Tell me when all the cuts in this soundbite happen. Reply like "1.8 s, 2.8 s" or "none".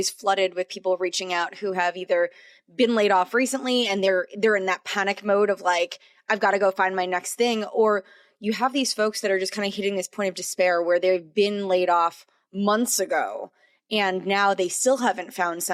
none

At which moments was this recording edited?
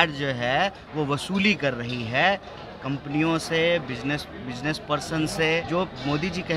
5.7 s

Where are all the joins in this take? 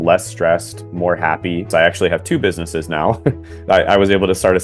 1.7 s

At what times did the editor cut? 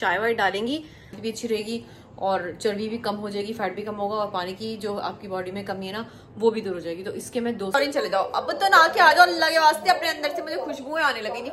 1.2 s, 7.7 s

